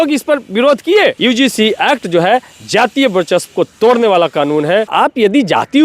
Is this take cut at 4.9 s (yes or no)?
yes